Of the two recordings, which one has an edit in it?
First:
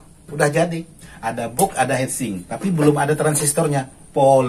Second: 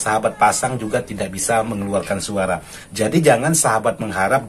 second; 1 cut; at 2.8 s

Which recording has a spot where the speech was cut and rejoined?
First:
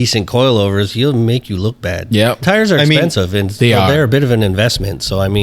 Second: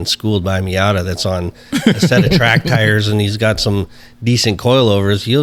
first; 1 cut; at 2.4 s

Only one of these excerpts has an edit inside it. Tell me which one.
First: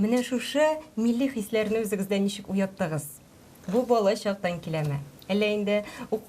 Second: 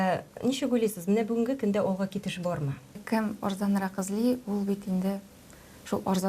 second; 1 cut; at 3.0 s

